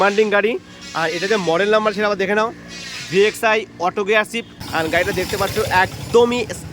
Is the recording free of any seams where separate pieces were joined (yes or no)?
no